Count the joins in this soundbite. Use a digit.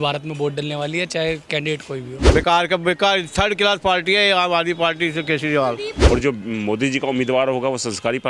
2